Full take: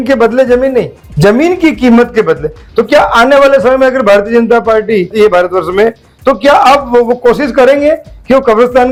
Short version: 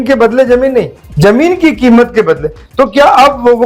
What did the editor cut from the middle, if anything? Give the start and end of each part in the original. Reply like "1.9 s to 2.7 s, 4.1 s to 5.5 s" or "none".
2.6 s to 6.1 s

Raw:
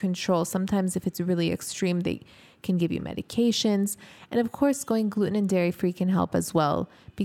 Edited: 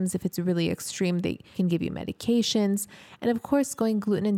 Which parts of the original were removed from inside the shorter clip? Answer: 2.2 s to 2.5 s

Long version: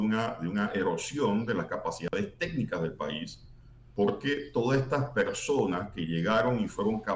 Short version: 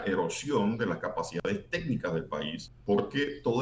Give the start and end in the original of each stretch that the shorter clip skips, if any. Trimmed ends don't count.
3.3 s to 3.8 s

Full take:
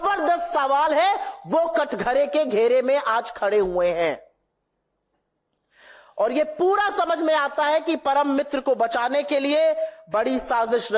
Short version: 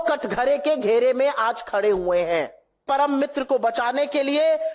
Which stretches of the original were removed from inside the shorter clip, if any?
4.5 s to 8.0 s

